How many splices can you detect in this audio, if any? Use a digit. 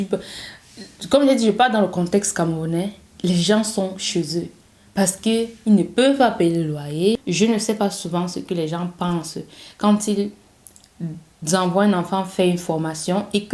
1